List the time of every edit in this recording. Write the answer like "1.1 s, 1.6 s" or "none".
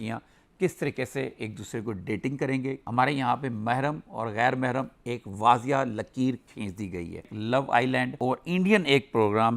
2.8 s, 7.2 s